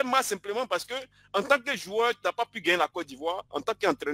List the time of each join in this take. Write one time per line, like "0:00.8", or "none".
none

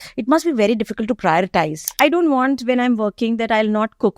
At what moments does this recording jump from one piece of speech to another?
0:01.8

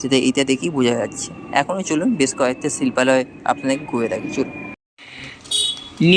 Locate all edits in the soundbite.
none

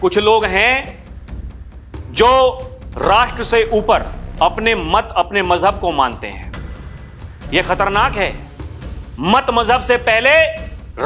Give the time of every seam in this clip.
none

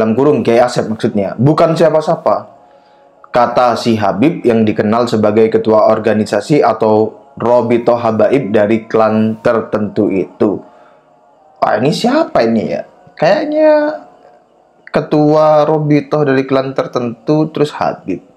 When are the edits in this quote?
none

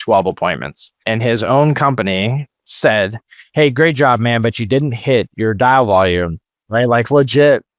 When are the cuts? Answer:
0:00.9
0:05.3

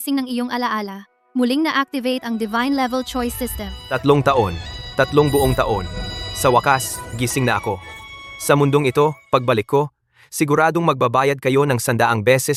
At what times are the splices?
none

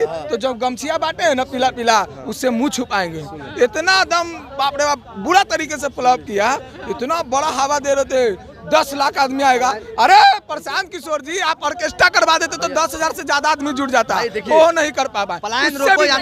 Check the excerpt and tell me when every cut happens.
none

